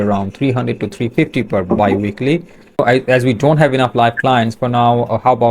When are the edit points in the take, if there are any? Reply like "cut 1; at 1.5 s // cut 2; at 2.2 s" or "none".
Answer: cut 1; at 2.8 s